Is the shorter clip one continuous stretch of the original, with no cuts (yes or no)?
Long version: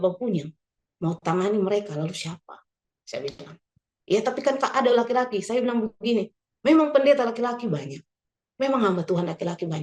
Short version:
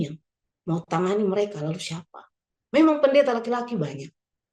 no